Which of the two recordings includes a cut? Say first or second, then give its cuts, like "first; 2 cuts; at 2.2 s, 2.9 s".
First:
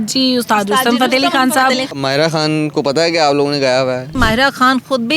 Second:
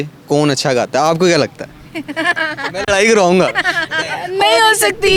first; 2 cuts; at 1.9 s, 4.2 s